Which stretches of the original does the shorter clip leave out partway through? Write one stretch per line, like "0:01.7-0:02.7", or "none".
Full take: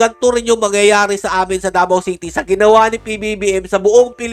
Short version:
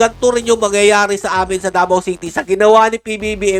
none